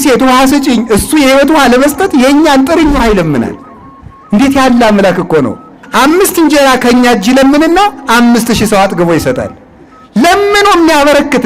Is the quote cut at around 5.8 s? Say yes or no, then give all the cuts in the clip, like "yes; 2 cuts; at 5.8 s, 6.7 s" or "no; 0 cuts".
yes; 1 cut; at 5.8 s